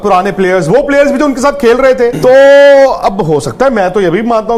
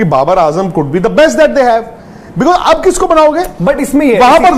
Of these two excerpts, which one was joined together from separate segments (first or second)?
first